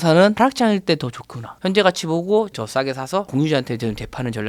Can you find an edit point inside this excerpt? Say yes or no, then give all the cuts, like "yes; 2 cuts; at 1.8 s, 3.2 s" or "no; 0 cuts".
no; 0 cuts